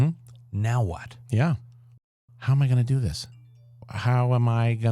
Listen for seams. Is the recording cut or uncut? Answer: cut